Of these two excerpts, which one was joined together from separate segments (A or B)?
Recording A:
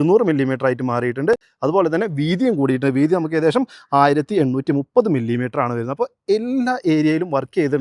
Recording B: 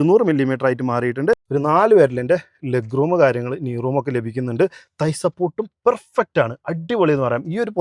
B